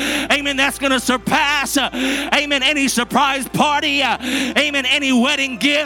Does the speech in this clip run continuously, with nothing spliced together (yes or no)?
yes